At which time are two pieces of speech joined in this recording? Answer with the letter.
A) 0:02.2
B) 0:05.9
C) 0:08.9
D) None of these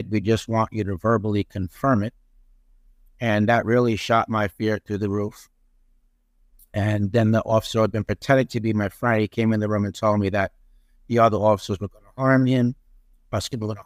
D